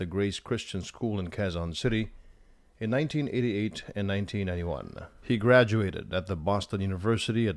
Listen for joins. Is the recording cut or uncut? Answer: cut